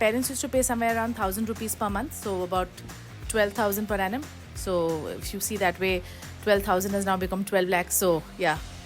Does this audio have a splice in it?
no; 0 cuts

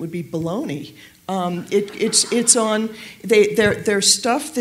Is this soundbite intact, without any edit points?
yes; 0 cuts

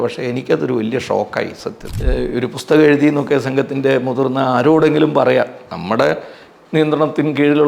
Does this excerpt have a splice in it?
yes; 1 cut; at 1.8 s

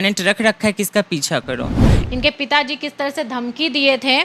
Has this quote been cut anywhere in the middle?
yes; 1 cut; at 1.9 s

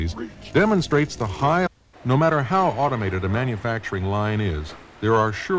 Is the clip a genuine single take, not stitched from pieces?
yes; 0 cuts

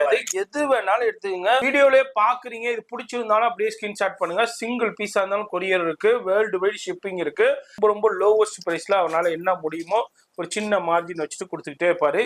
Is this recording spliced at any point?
yes; 2 cuts; at 1.7 s, 7.8 s

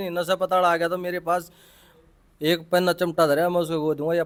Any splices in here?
no; 0 cuts

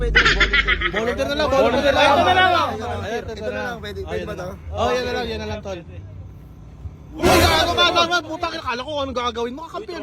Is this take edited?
no; 0 cuts

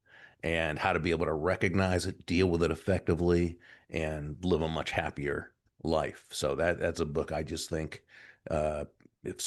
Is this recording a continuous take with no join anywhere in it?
yes; 0 cuts

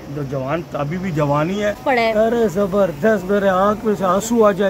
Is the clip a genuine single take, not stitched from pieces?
no; 1 cut; at 1.8 s

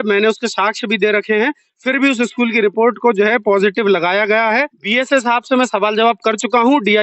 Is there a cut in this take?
yes; 1 cut; at 4.8 s

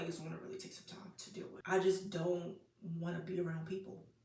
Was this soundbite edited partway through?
yes; 1 cut; at 1.6 s

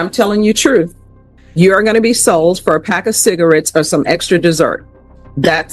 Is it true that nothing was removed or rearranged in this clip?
yes; 0 cuts

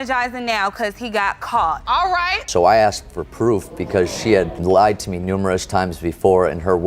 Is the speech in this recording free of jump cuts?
no; 1 cut; at 2.4 s

